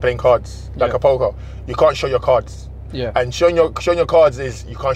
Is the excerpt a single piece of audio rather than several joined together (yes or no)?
yes